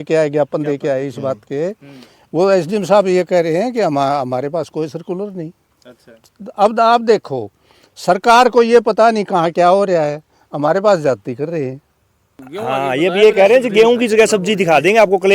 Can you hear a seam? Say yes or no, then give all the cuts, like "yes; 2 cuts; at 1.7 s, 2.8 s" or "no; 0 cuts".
yes; 1 cut; at 12.5 s